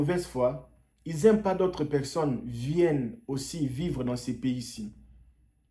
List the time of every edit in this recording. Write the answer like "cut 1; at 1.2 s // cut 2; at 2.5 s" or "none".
none

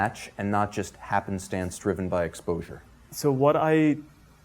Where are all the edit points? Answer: cut 1; at 3.1 s

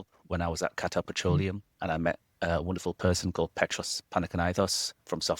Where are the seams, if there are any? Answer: cut 1; at 1.7 s

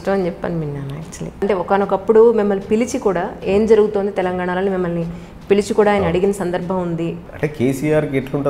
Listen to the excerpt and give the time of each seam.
cut 1; at 1.4 s // cut 2; at 7.2 s

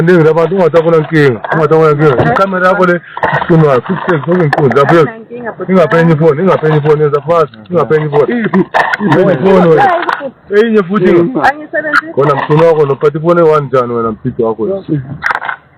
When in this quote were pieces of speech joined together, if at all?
none

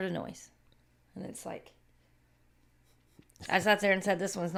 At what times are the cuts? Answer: none

